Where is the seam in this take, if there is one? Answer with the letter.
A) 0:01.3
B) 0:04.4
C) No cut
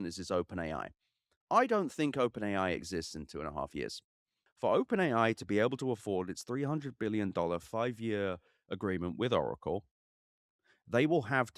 B